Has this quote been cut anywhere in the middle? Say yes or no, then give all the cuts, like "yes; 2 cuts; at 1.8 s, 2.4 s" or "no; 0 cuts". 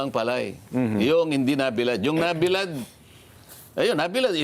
no; 0 cuts